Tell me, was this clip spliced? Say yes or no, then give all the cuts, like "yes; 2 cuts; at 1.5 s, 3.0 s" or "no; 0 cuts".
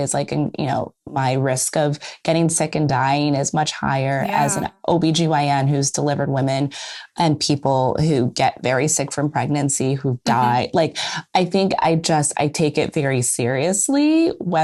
no; 0 cuts